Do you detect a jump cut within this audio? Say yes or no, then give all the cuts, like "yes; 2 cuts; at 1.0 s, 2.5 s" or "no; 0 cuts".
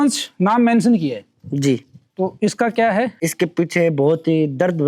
no; 0 cuts